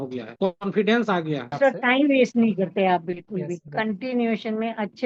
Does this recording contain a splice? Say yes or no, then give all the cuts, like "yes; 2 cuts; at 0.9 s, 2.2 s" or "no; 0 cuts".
yes; 1 cut; at 1.5 s